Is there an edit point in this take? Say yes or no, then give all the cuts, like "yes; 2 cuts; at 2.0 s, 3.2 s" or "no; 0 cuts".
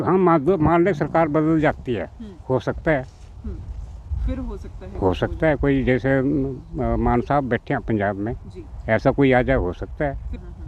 no; 0 cuts